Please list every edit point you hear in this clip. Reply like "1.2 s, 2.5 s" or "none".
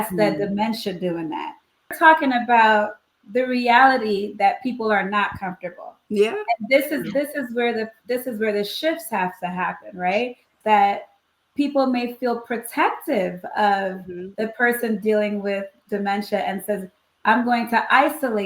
1.9 s, 10.5 s